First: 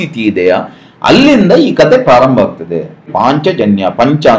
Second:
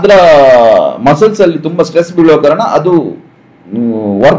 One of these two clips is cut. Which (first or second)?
first